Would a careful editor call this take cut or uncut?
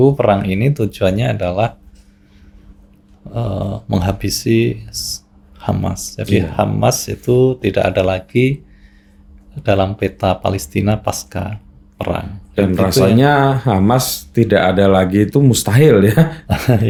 uncut